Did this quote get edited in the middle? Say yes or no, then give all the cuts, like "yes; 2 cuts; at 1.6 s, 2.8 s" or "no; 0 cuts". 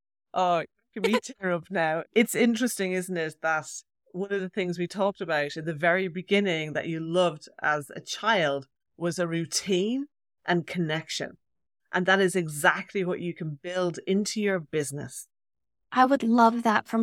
no; 0 cuts